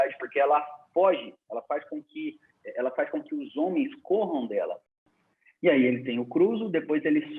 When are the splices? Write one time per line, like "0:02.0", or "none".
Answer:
0:05.1